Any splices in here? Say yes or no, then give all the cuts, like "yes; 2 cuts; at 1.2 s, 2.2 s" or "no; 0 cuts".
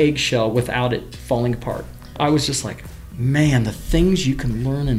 yes; 2 cuts; at 1.1 s, 2.2 s